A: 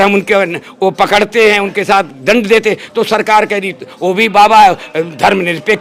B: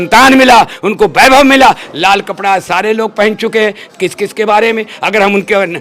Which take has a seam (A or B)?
B